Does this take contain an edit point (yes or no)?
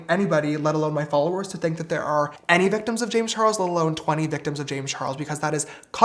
no